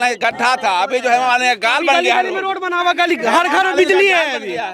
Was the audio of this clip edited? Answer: no; 0 cuts

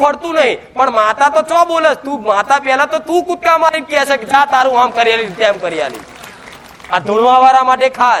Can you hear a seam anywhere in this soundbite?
no; 0 cuts

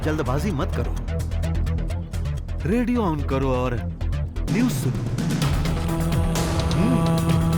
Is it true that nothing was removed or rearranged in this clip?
yes; 0 cuts

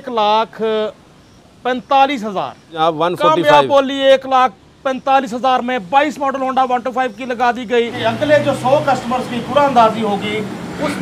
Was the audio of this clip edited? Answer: yes; 2 cuts; at 2.7 s, 7.9 s

